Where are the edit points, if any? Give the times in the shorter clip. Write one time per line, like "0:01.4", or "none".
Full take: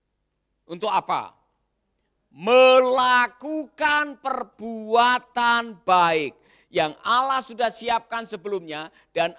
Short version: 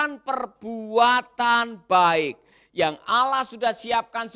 none